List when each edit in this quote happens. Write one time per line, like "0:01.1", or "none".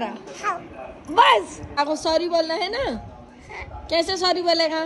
0:01.8